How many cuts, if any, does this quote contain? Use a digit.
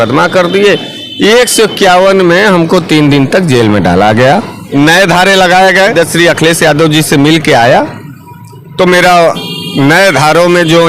2